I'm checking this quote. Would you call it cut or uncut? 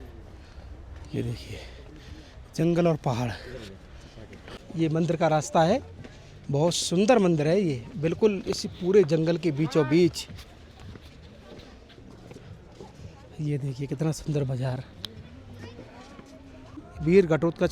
cut